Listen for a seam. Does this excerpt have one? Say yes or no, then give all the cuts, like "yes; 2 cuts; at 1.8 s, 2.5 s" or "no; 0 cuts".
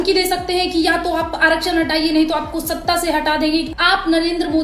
yes; 1 cut; at 3.7 s